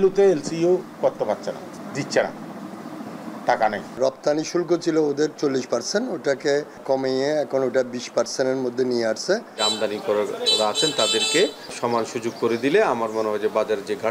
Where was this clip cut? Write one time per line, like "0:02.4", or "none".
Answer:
0:01.8
0:04.0
0:06.8
0:09.6
0:11.7